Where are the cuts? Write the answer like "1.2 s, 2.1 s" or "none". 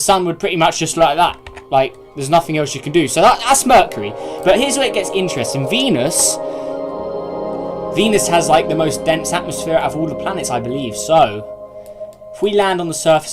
7.6 s